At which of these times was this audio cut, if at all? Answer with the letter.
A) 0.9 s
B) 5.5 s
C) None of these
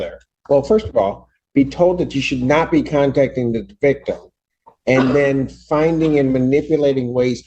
C